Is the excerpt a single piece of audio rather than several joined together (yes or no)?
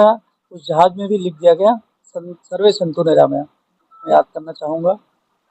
no